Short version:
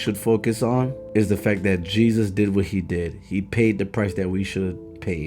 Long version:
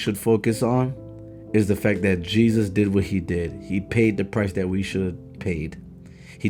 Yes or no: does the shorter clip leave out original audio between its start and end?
yes